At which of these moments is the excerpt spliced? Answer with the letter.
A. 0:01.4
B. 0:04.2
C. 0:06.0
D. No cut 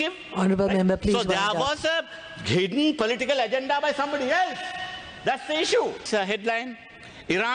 C